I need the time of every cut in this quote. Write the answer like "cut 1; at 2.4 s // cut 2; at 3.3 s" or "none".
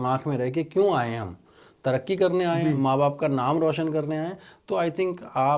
none